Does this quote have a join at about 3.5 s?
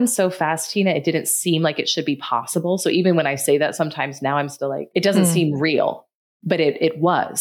no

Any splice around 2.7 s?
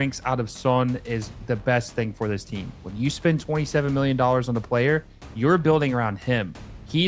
yes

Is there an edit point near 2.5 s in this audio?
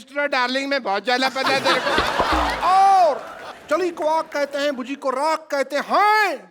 yes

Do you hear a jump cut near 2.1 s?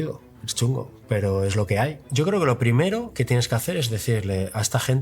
yes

